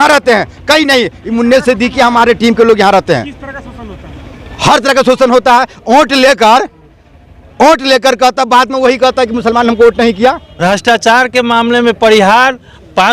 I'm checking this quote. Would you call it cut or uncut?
cut